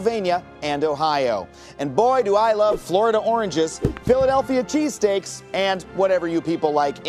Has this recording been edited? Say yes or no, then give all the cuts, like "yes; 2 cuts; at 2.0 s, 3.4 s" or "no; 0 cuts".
no; 0 cuts